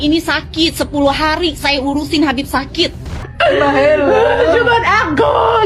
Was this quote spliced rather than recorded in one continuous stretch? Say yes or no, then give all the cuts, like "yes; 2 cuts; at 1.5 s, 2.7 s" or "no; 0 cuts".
yes; 1 cut; at 3.3 s